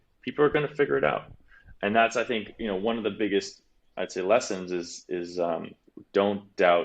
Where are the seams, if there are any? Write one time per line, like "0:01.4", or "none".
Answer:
0:05.9